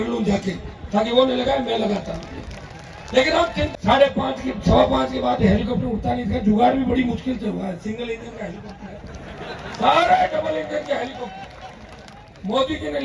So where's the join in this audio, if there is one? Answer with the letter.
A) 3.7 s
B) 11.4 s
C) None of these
A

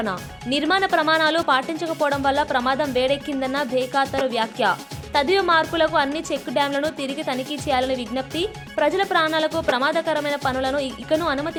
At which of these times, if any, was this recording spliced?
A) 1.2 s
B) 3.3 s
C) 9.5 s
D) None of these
D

